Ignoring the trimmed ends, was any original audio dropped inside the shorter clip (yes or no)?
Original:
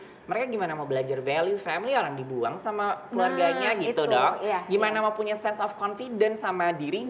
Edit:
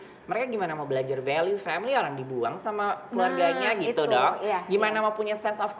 no